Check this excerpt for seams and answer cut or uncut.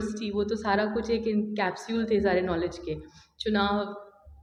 uncut